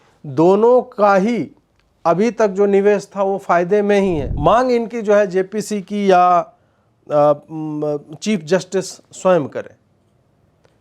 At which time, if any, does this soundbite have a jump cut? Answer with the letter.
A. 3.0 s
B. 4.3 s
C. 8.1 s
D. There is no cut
B